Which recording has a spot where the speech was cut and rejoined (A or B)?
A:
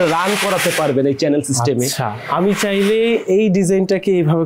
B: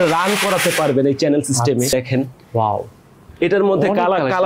B